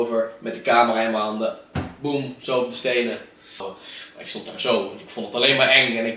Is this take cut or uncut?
cut